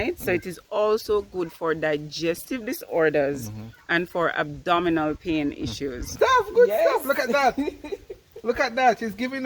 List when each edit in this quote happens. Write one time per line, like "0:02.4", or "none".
0:06.1